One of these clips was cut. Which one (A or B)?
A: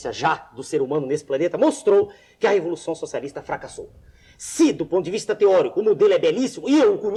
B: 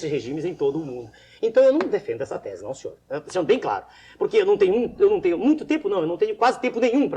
B